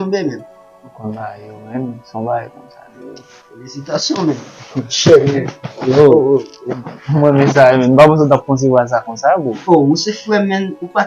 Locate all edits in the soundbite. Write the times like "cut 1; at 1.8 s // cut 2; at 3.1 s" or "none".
none